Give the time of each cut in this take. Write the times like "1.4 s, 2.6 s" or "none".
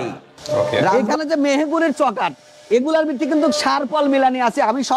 0.9 s